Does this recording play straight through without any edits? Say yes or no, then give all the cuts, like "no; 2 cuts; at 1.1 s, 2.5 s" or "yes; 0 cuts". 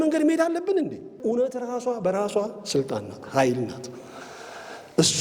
no; 1 cut; at 1.2 s